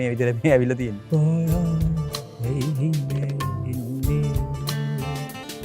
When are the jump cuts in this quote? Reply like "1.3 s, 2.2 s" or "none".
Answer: 1.0 s